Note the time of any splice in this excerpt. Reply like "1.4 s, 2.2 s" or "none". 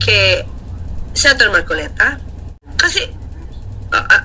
2.7 s